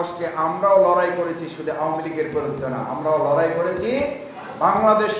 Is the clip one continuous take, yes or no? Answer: yes